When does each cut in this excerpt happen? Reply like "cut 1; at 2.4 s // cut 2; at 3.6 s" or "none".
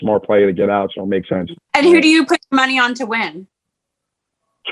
cut 1; at 1.5 s